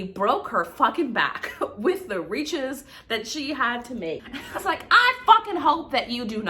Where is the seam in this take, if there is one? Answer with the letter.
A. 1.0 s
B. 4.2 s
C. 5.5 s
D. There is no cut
B